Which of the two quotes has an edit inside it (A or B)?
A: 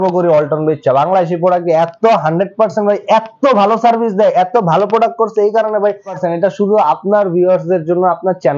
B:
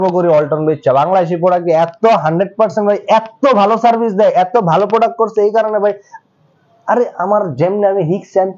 A